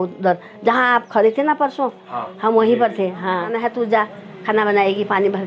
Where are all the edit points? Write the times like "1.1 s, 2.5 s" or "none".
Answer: 3.5 s

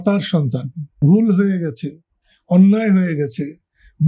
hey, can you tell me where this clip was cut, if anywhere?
1.0 s

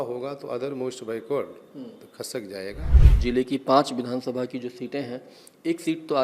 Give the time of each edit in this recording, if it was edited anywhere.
3.0 s

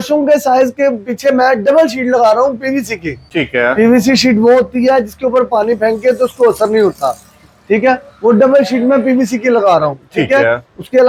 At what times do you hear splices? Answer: none

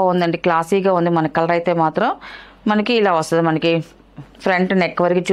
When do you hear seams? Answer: none

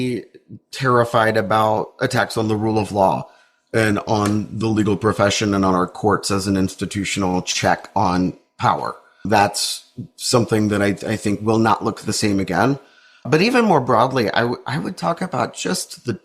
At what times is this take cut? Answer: 9.3 s

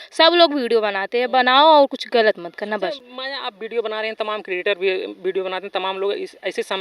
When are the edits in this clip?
none

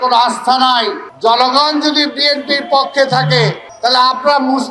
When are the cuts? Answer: 1.0 s, 3.6 s

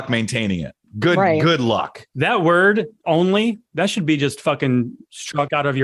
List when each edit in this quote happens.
3.0 s

